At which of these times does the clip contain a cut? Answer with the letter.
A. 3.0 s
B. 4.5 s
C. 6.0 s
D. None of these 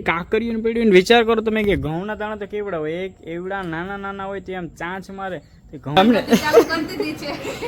C